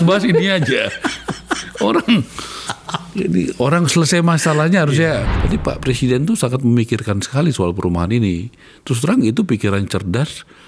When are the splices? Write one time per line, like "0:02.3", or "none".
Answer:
0:05.3